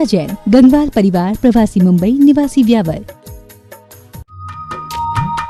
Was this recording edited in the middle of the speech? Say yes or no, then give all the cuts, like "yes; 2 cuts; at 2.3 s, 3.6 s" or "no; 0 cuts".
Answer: no; 0 cuts